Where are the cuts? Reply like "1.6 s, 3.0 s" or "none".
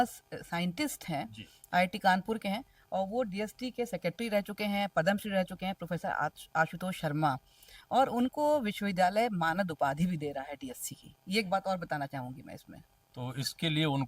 none